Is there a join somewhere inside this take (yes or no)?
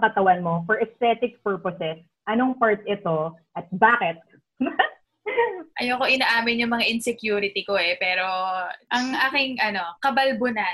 yes